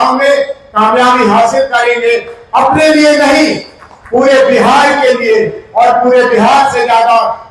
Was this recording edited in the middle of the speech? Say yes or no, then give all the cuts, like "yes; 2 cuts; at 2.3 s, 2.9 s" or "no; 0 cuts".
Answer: no; 0 cuts